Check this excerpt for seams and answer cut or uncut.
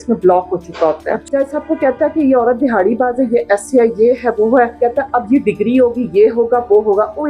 cut